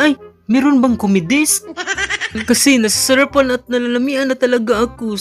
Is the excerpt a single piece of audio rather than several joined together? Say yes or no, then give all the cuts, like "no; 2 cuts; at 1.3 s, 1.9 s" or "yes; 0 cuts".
no; 1 cut; at 2.3 s